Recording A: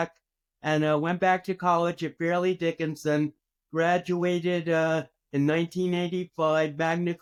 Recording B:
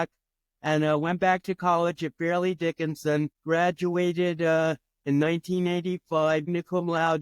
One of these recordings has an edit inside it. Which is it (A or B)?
B